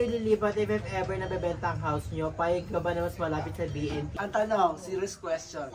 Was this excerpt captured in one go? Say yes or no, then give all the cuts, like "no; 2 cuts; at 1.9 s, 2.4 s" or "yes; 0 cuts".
no; 1 cut; at 4.1 s